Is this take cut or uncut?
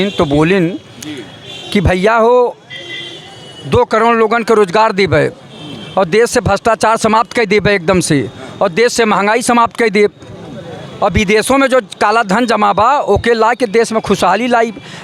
uncut